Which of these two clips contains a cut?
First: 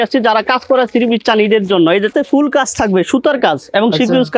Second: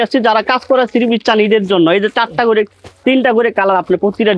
first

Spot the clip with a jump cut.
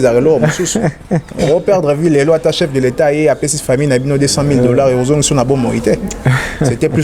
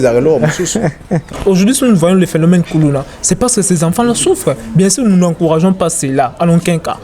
second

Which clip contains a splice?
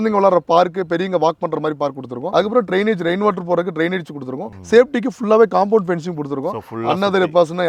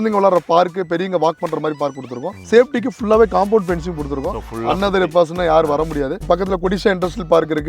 second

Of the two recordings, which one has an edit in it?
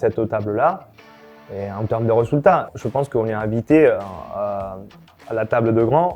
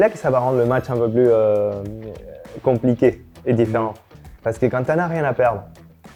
first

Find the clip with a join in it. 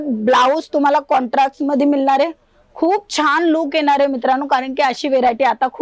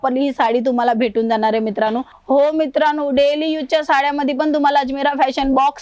second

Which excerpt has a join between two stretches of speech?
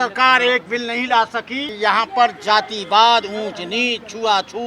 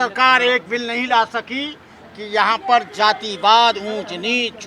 first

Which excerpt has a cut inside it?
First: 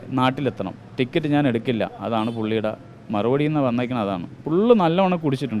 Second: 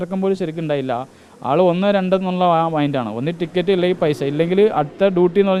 first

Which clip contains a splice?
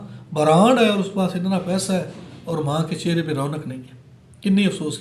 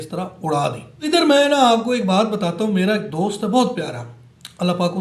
second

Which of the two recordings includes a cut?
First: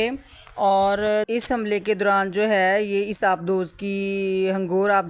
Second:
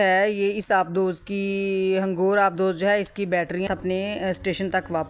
second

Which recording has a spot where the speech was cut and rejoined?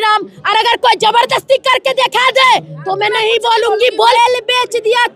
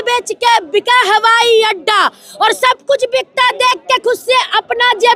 first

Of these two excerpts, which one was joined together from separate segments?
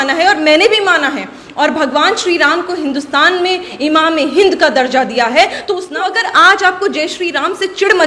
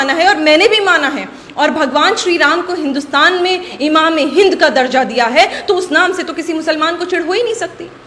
first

